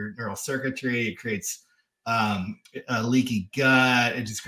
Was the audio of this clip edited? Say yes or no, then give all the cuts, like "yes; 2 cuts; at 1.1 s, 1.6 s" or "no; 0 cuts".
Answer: no; 0 cuts